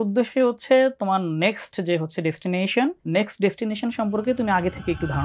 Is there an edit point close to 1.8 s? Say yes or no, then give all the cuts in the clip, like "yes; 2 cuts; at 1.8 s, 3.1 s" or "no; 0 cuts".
no; 1 cut; at 3.0 s